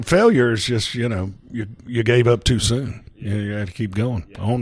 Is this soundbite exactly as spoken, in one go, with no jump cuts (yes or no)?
no